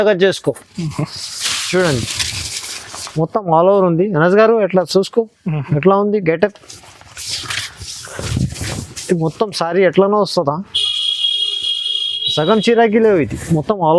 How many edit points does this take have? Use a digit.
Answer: 0